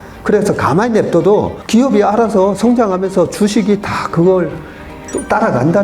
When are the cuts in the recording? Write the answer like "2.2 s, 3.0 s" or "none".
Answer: 1.6 s